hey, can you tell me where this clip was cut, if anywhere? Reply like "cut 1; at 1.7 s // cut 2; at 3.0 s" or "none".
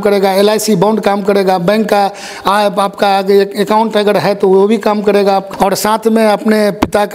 cut 1; at 5.5 s